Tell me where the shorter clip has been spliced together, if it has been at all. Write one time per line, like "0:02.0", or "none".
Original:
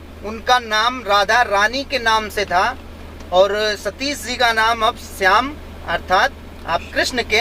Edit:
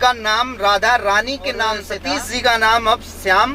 0:01.9